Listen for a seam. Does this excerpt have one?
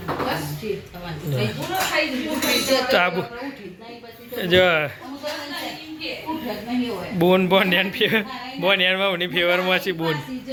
no; 0 cuts

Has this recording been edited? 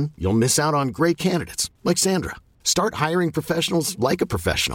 no; 0 cuts

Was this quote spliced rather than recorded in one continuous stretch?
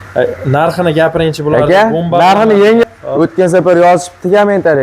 yes; 1 cut; at 2.8 s

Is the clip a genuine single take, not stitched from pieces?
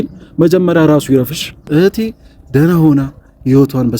no; 1 cut; at 1.7 s

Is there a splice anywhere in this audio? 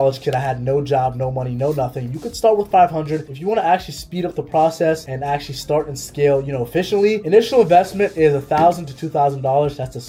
no; 0 cuts

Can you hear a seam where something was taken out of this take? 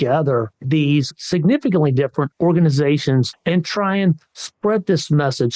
yes; 3 cuts; at 1.2 s, 2.3 s, 3.3 s

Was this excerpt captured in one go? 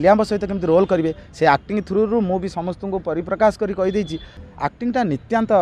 no; 1 cut; at 4.4 s

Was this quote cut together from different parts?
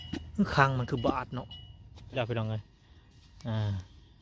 yes; 1 cut; at 2.1 s

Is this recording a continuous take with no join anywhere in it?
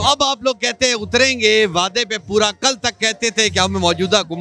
yes; 0 cuts

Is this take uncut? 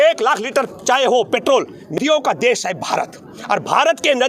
no; 1 cut; at 2.0 s

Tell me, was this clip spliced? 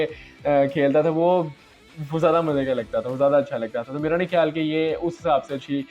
no; 0 cuts

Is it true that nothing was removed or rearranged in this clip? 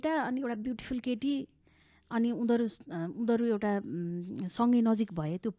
yes; 0 cuts

